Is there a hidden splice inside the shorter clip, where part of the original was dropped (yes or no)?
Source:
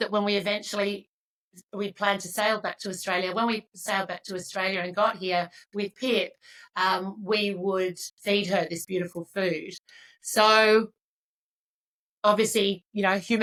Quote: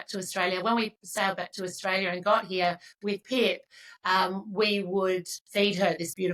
no